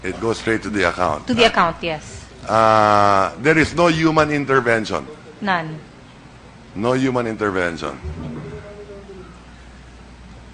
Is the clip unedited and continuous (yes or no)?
yes